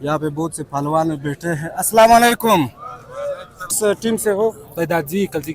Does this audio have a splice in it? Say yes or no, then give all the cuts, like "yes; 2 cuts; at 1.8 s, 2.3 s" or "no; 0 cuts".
yes; 1 cut; at 3.7 s